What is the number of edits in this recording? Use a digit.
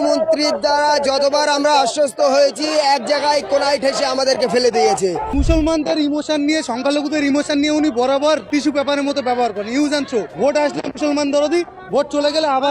3